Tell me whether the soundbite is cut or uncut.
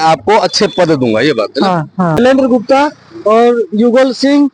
cut